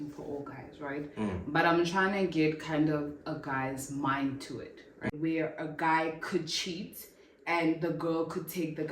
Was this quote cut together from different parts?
yes; 1 cut; at 5.1 s

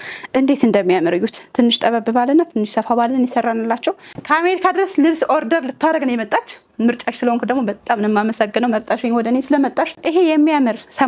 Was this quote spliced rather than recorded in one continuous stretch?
yes; 2 cuts; at 4.1 s, 9.9 s

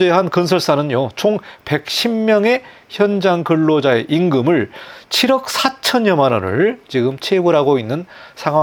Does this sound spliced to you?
no; 0 cuts

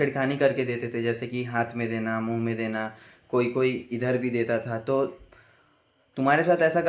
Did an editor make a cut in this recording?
no; 0 cuts

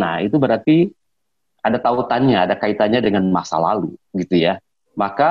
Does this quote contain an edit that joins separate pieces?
no; 0 cuts

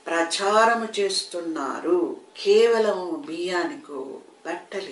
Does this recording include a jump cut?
yes; 1 cut; at 2.3 s

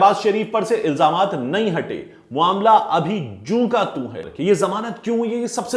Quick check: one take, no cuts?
no; 1 cut; at 4.2 s

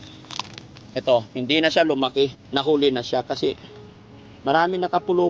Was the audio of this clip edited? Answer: yes; 1 cut; at 2.4 s

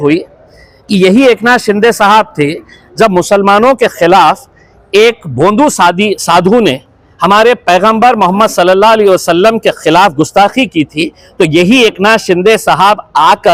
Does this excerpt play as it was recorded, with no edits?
yes; 0 cuts

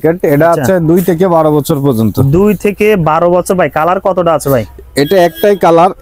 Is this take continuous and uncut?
yes; 0 cuts

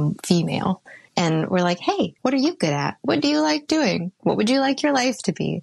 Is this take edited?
yes; 3 cuts; at 0.9 s, 2.1 s, 4.1 s

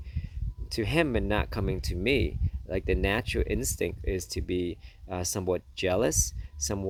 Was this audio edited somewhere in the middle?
no; 0 cuts

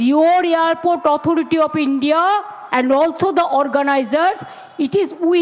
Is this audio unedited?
no; 1 cut; at 2.6 s

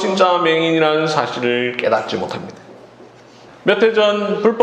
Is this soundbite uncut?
no; 1 cut; at 3.4 s

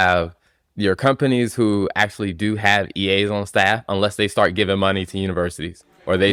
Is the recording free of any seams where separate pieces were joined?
yes; 0 cuts

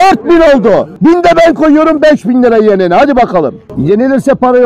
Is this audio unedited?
no; 1 cut; at 3.6 s

